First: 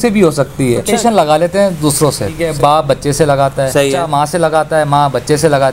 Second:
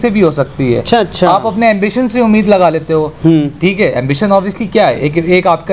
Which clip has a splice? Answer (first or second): first